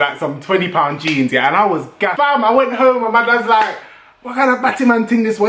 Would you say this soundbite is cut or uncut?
cut